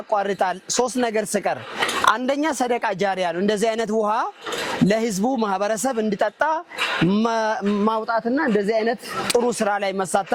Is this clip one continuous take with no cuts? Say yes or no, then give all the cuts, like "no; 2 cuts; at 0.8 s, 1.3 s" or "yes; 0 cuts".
yes; 0 cuts